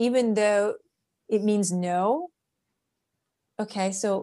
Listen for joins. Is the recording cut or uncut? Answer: uncut